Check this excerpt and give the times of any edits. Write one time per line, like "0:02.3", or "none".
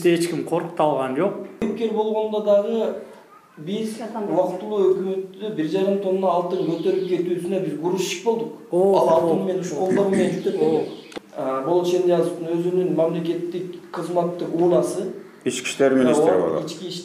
0:01.6
0:11.0